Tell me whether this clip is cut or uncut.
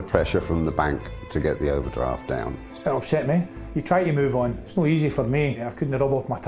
cut